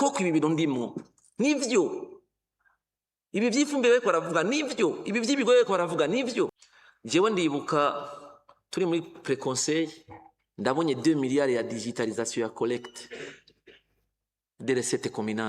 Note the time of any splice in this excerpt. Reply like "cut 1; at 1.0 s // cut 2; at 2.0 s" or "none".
cut 1; at 6.5 s